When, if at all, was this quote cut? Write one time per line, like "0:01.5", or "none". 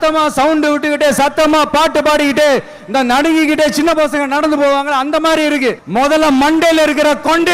0:05.8